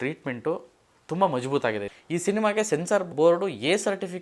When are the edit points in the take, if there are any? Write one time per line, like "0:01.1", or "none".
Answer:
0:01.9
0:03.1